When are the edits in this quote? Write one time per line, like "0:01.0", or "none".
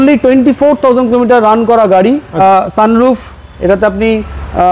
0:02.4